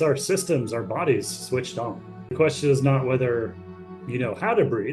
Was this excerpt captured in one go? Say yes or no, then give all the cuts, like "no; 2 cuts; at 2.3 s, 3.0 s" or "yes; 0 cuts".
no; 1 cut; at 2.3 s